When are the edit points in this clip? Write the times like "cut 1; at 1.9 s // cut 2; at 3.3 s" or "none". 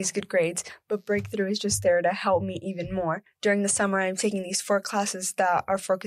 cut 1; at 3.3 s